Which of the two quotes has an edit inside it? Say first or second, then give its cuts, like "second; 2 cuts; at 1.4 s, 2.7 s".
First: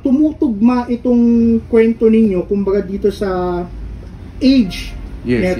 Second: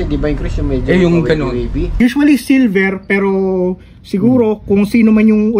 second; 1 cut; at 2.0 s